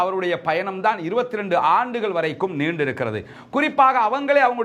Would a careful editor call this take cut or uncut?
uncut